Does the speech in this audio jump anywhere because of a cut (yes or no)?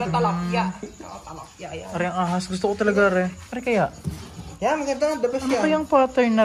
yes